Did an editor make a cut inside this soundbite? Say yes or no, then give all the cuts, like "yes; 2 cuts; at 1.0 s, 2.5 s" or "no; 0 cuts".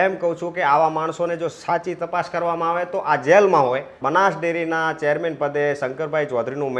yes; 1 cut; at 3.9 s